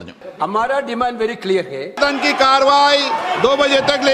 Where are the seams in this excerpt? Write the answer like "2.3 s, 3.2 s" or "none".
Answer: 2.0 s